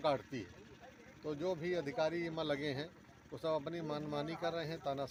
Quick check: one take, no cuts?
yes; 0 cuts

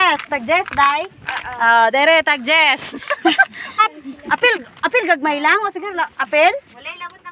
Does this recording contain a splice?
yes; 1 cut; at 3.8 s

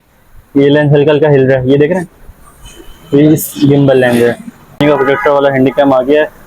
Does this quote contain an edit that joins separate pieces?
yes; 1 cut; at 4.8 s

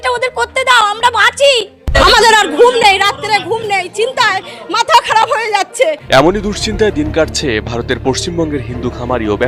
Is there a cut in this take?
yes; 1 cut; at 6.0 s

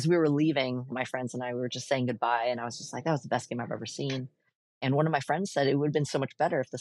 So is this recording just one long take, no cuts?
no; 1 cut; at 0.9 s

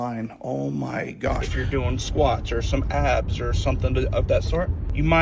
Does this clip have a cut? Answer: yes; 1 cut; at 1.5 s

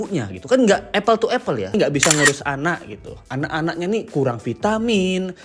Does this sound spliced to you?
yes; 1 cut; at 1.8 s

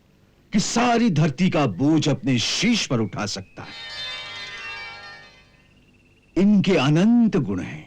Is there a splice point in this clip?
yes; 1 cut; at 3.9 s

